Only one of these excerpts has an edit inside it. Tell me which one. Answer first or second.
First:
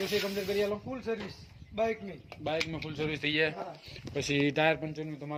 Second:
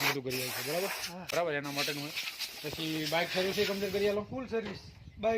second